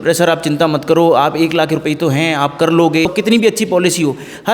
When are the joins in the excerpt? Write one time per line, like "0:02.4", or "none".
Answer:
0:03.1